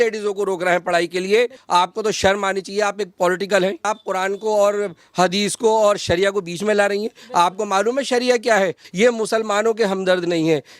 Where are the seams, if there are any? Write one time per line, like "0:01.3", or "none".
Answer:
0:01.6
0:03.8
0:08.8